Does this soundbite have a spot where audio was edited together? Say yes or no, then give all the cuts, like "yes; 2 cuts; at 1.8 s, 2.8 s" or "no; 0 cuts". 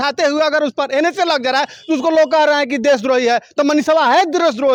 no; 0 cuts